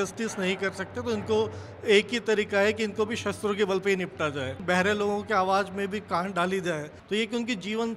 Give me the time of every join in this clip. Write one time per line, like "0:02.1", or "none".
0:04.6
0:06.9